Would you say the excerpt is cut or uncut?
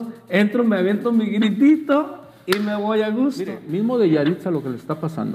cut